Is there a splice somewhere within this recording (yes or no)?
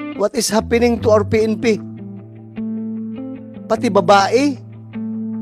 yes